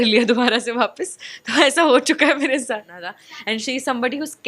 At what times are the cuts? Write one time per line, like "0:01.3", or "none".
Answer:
0:03.3